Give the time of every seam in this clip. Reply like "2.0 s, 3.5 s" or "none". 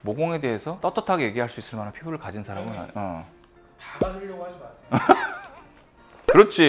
none